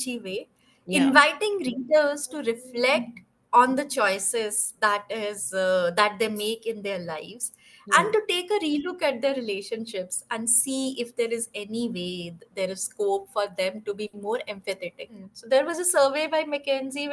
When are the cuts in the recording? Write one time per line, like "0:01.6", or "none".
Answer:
0:15.3